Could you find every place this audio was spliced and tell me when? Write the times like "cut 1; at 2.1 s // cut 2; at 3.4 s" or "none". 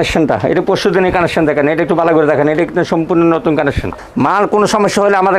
cut 1; at 3.9 s